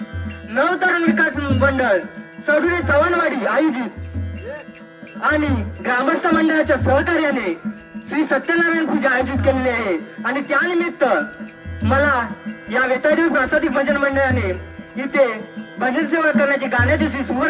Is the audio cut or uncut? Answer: uncut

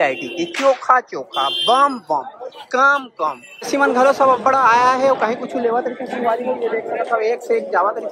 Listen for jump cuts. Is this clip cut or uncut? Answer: cut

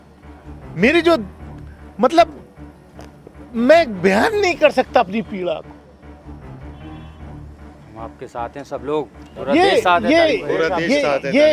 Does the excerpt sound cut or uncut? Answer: cut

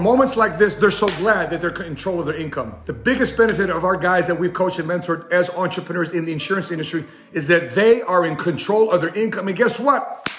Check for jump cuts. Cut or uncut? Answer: uncut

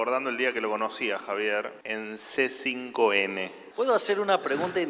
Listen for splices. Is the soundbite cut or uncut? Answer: cut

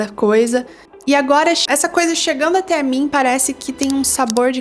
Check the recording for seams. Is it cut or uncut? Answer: cut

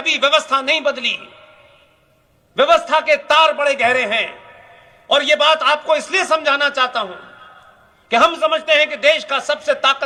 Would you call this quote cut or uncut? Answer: uncut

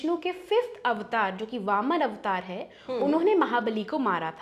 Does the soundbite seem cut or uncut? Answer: uncut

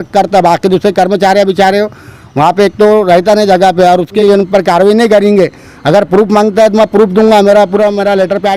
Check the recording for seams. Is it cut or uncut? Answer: cut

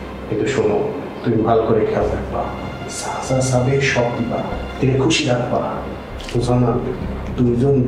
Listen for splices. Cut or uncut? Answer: uncut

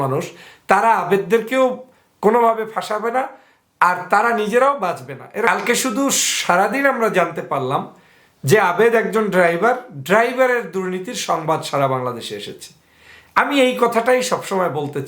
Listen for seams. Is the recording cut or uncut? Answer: cut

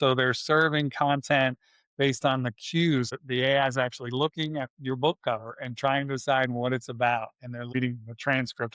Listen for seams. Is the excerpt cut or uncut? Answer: cut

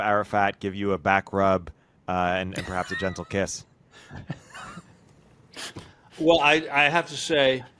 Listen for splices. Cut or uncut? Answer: uncut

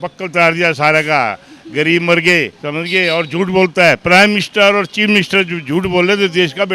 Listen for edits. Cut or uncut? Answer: cut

